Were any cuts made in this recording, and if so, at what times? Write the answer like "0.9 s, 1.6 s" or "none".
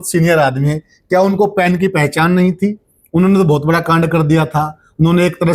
none